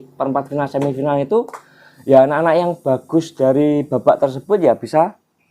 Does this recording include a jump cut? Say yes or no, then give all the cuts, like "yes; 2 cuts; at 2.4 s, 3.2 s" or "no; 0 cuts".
no; 0 cuts